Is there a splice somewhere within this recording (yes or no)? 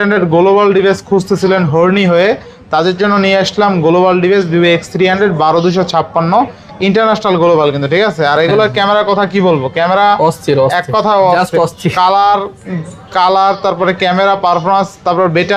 no